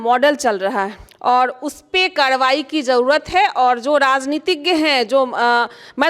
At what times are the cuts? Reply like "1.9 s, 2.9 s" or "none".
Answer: 1.0 s